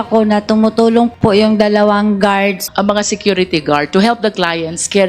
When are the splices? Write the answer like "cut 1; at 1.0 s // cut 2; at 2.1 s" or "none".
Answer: cut 1; at 2.6 s